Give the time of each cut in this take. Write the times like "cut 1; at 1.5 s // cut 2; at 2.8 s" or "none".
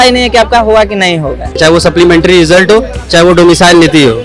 cut 1; at 1.5 s